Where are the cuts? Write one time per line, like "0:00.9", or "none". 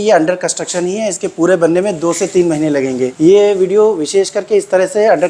0:03.1